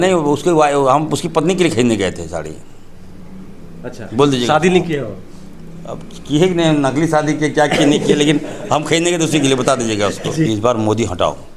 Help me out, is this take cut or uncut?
cut